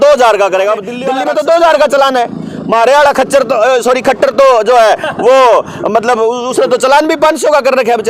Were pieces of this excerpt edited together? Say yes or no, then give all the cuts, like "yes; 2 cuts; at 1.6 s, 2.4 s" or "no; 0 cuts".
yes; 1 cut; at 0.9 s